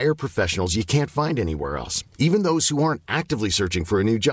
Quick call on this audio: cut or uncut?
uncut